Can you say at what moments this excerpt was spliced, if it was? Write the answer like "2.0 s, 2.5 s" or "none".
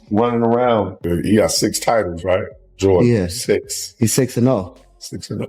0.9 s

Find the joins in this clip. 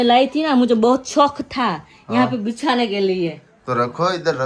none

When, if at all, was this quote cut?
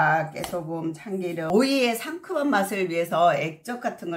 1.5 s

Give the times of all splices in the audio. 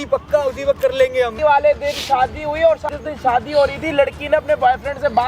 1.3 s, 3.0 s

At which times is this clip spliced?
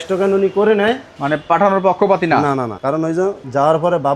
1.1 s, 2.9 s

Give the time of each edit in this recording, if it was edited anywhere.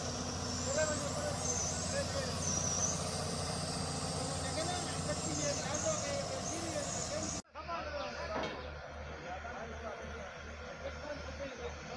7.5 s

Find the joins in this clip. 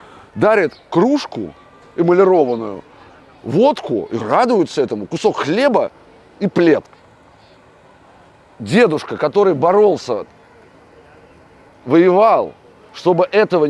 7.0 s

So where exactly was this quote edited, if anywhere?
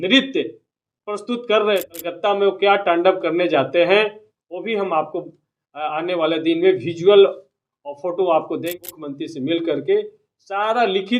1.9 s, 8.6 s

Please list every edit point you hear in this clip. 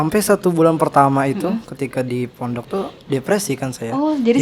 none

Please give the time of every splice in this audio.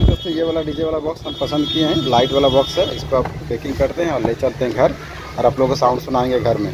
none

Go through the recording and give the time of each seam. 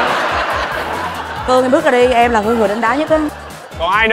none

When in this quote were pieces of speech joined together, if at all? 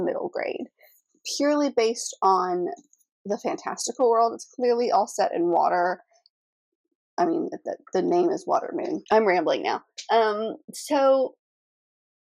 9.0 s

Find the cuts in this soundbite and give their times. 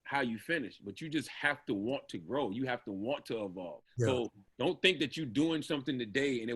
3.8 s

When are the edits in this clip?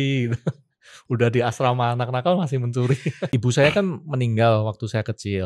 3.3 s

